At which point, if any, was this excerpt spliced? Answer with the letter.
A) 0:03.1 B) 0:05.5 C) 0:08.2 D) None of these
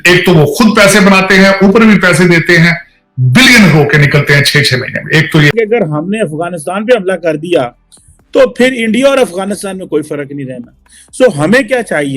B